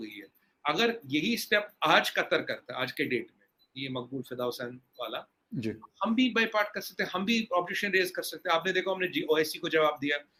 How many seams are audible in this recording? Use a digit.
0